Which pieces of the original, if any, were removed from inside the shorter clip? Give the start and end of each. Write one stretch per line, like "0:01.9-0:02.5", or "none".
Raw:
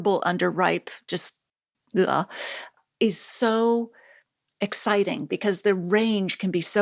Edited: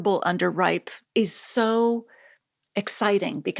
0:00.9-0:02.8